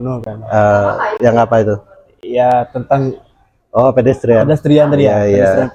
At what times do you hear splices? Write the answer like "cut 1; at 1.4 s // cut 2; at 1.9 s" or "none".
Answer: none